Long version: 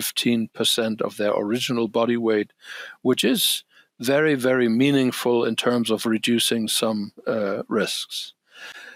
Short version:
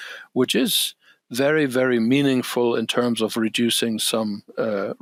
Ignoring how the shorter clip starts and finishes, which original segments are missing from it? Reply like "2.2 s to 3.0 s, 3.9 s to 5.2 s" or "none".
none